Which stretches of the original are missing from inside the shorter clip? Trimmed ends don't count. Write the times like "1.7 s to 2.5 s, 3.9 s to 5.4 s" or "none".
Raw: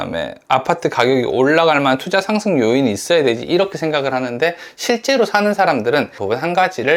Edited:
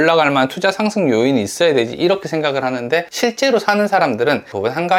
4.6 s to 4.8 s